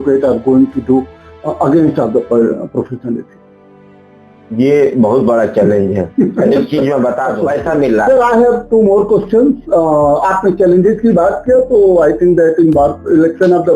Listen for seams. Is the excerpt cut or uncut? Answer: cut